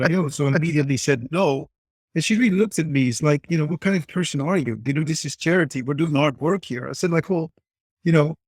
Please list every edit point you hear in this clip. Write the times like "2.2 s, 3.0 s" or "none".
none

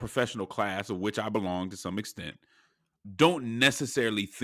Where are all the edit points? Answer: 3.0 s

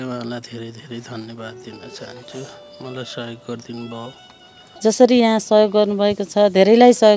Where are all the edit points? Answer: 4.7 s

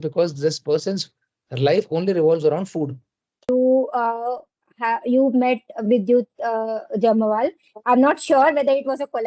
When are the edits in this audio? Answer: 3.5 s

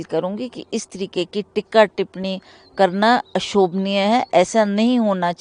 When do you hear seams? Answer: none

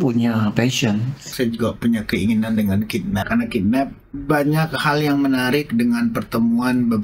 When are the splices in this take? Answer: 1.3 s, 3.2 s, 4.1 s

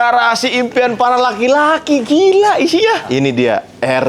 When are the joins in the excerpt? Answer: 3.1 s

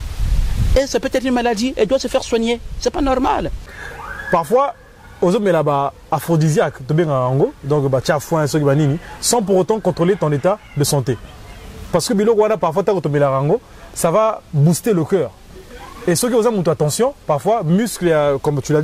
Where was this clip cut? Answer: 3.5 s

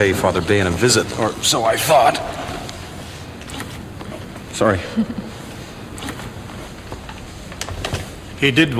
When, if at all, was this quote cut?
3.9 s

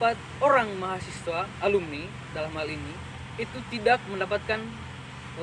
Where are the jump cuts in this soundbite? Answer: none

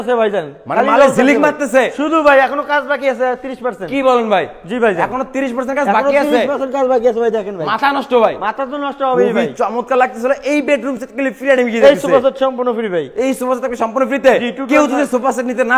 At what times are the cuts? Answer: none

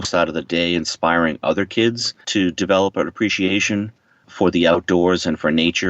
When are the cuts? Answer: 2.1 s, 4.3 s

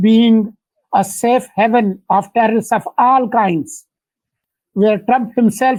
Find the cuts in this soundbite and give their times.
none

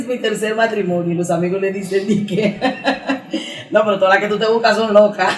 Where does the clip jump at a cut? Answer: none

